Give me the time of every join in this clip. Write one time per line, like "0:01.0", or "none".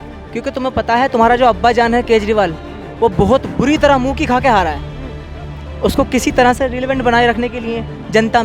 none